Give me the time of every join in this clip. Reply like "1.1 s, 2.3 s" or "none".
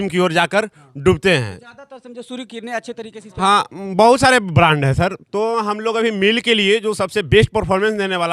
3.2 s